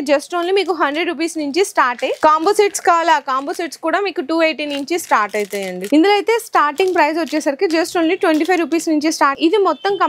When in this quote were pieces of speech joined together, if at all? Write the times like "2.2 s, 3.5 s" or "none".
2.1 s, 5.8 s, 9.3 s